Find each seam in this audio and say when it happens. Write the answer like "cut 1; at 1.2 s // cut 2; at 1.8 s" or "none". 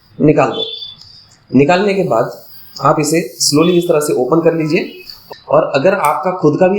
cut 1; at 5.2 s